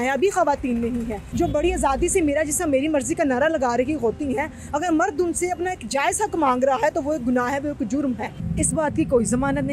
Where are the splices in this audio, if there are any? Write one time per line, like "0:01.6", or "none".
0:01.2
0:08.4